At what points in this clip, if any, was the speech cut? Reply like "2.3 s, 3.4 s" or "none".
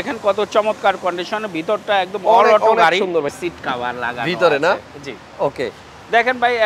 3.3 s